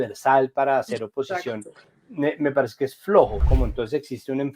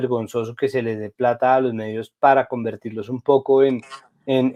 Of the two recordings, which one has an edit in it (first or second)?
first